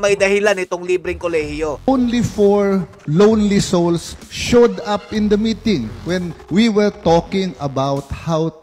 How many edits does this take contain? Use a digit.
1